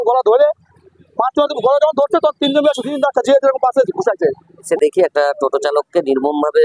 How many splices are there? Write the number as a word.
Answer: one